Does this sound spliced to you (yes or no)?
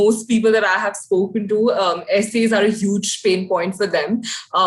no